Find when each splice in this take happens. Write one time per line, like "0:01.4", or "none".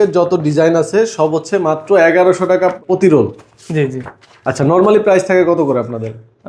0:02.8

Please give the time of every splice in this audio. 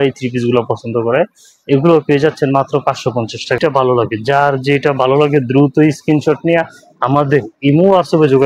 0:03.6

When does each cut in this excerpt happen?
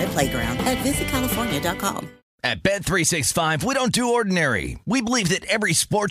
0:02.2

